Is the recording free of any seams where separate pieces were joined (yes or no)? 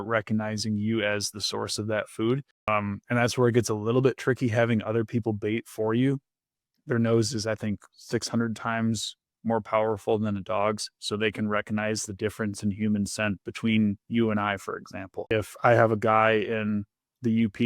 no